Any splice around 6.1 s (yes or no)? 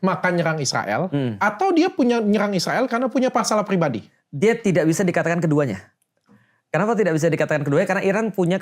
no